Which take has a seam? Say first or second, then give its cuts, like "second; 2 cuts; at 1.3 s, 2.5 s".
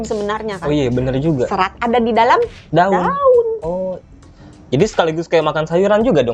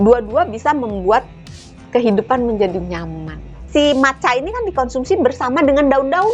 second; 1 cut; at 3.5 s